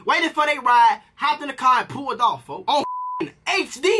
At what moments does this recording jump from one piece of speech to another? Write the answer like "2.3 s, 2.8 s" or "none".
1.1 s